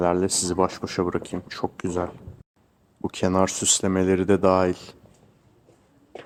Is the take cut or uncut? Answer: uncut